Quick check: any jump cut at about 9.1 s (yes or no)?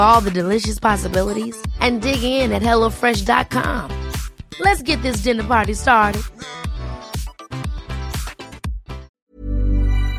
yes